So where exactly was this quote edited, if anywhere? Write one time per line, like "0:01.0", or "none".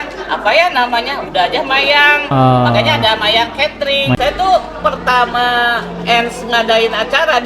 0:04.2